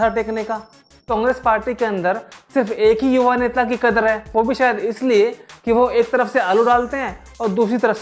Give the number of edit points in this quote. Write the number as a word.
one